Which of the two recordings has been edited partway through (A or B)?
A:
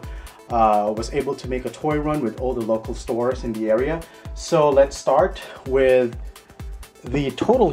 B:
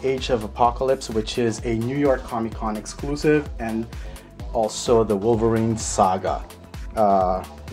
B